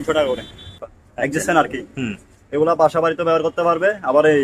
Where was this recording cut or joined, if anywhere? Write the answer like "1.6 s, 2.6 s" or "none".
0.9 s